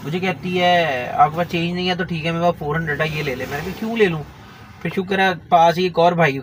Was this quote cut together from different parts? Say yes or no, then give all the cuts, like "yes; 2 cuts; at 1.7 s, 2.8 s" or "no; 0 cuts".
no; 0 cuts